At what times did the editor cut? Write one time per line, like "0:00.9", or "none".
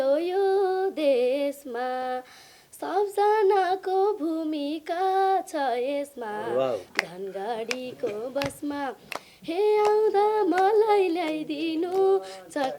none